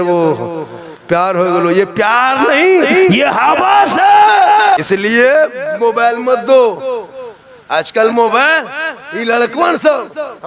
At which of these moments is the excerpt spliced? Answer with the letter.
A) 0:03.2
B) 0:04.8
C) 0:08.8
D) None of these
B